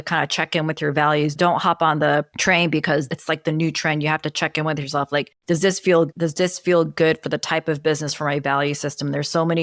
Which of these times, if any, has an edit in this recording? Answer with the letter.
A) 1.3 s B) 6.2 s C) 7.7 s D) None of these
A